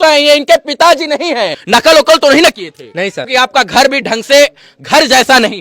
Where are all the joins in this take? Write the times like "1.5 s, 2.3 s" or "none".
1.6 s, 3.3 s